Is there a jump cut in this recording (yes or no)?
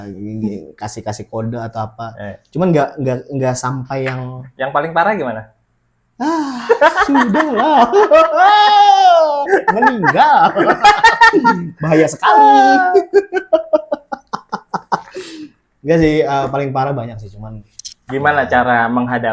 no